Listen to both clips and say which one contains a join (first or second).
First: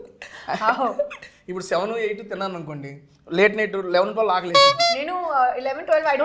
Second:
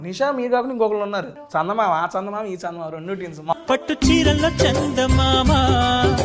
second